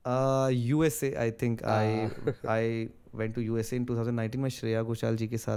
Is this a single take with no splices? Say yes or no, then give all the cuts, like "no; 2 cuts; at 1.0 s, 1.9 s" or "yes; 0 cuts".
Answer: yes; 0 cuts